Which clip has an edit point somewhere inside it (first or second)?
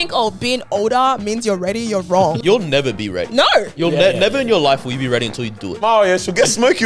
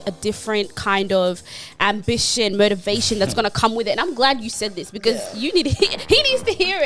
first